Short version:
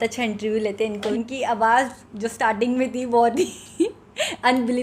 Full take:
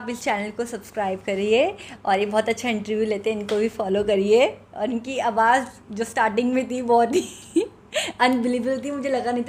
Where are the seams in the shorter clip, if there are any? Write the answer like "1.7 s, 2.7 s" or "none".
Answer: 1.0 s